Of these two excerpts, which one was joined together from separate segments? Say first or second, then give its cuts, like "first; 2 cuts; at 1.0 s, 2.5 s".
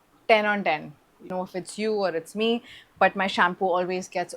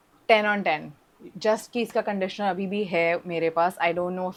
first; 1 cut; at 1.3 s